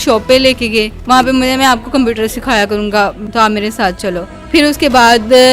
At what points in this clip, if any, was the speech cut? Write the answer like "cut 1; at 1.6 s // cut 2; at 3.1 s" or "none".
cut 1; at 0.9 s // cut 2; at 3.2 s // cut 3; at 4.3 s